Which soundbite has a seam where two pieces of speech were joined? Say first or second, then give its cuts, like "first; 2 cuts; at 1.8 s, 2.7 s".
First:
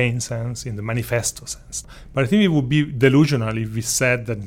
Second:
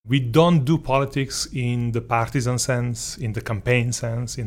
first; 1 cut; at 1.7 s